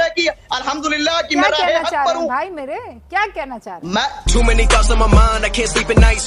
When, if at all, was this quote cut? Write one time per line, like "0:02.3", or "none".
none

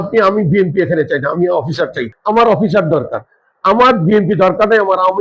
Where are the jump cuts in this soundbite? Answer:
0:02.1

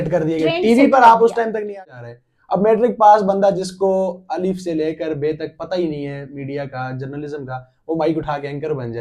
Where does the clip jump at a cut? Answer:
0:01.7

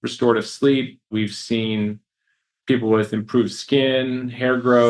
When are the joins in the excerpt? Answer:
0:01.1

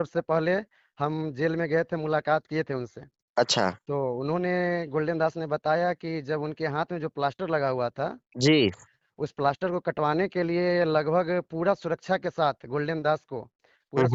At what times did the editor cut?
none

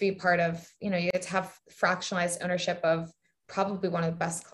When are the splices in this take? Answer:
0:01.1

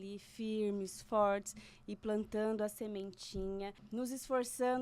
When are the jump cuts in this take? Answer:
0:03.8

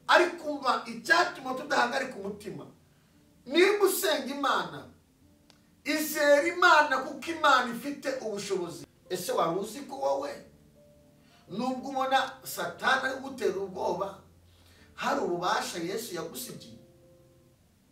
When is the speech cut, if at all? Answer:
0:08.9

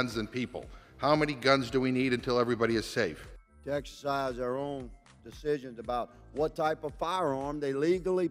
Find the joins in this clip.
0:03.2

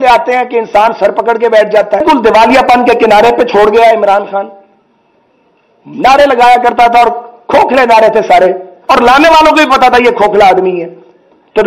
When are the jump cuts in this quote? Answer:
0:02.0

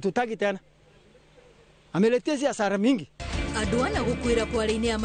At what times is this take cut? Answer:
none

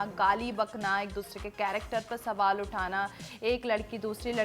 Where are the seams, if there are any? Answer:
none

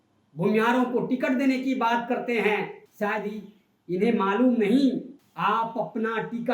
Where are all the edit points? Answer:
0:02.8
0:05.2

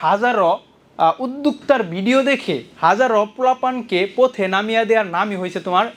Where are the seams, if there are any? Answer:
none

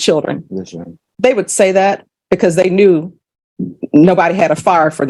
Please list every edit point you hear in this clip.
none

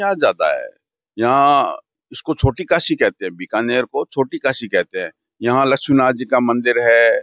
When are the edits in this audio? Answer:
none

